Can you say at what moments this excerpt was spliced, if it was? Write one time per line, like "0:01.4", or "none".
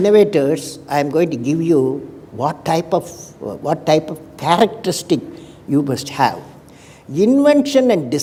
none